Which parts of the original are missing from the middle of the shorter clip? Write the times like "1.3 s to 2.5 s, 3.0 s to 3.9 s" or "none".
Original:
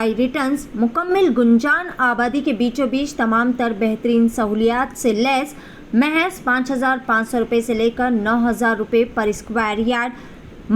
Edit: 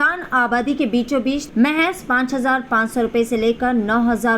3.1 s to 5.8 s